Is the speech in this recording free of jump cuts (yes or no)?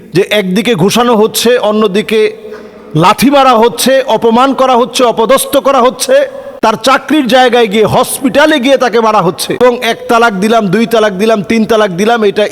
no